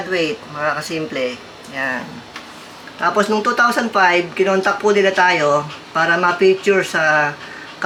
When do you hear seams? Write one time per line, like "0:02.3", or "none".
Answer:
none